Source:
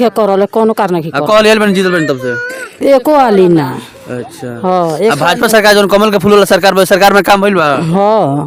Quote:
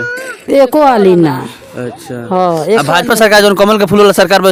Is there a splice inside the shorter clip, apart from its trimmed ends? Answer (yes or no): no